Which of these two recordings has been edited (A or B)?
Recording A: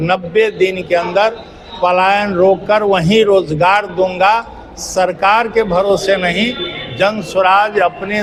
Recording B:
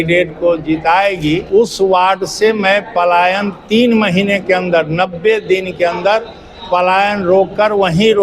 B